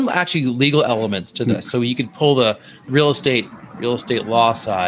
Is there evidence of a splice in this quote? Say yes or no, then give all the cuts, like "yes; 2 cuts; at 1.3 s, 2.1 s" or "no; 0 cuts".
yes; 1 cut; at 2.9 s